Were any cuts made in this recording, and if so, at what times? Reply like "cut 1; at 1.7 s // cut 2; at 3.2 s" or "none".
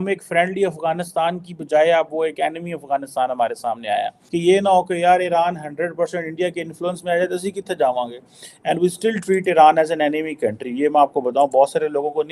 cut 1; at 4.2 s